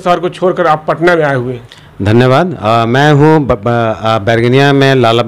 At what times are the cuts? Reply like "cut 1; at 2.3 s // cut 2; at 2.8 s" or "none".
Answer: none